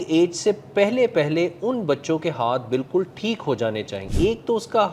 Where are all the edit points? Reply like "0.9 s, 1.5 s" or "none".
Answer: 4.0 s